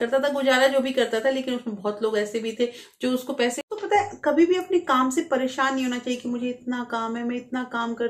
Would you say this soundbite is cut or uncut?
cut